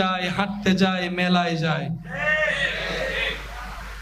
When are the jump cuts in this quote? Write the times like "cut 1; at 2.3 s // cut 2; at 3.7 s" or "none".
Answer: none

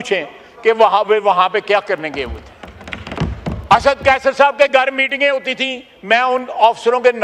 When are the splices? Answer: cut 1; at 3.1 s

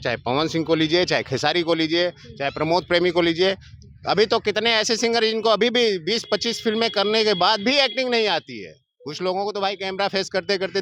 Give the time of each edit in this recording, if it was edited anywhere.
none

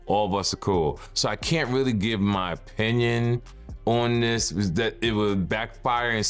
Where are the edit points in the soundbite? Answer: none

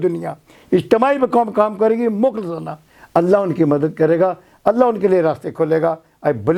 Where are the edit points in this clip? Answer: none

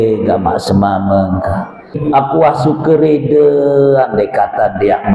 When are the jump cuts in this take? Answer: cut 1; at 1.9 s

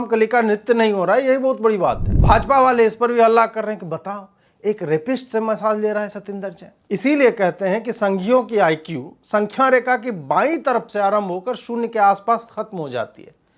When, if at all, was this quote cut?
cut 1; at 2.1 s

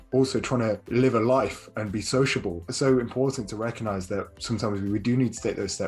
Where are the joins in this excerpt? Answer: cut 1; at 0.8 s // cut 2; at 2.7 s

